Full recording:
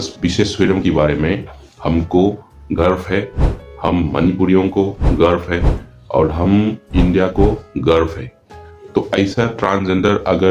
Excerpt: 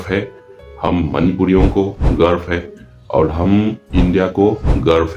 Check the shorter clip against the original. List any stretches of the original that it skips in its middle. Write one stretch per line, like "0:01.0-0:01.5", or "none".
none

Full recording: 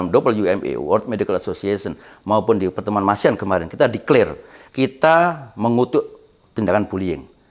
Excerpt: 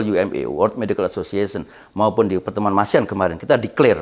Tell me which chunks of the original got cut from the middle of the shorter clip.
none

